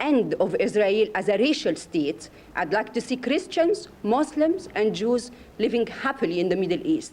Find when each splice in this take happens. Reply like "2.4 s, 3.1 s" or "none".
none